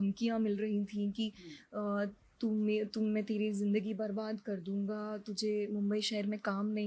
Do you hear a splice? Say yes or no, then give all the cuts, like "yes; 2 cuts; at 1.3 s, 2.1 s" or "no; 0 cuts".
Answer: no; 0 cuts